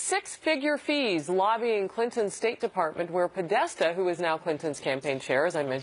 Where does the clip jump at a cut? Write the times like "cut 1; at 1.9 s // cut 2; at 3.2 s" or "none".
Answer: cut 1; at 4.2 s